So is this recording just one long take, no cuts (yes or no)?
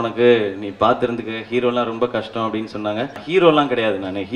no